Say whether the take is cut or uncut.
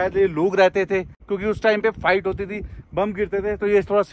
cut